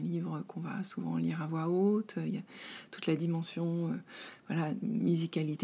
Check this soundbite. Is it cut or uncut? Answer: uncut